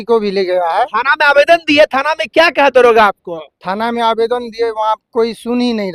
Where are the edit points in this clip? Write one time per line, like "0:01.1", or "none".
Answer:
none